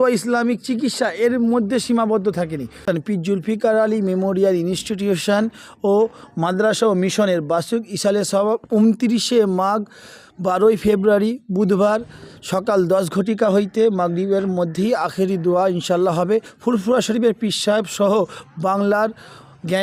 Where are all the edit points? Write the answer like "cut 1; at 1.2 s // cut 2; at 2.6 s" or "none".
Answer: cut 1; at 2.9 s // cut 2; at 16.5 s